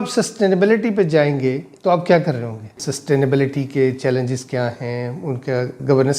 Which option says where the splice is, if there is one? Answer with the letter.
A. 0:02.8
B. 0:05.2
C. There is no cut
A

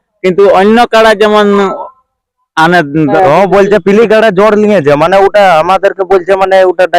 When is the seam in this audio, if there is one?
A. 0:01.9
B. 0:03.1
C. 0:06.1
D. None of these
B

